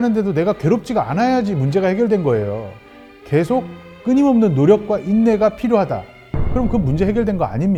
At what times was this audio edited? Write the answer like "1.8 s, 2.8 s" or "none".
none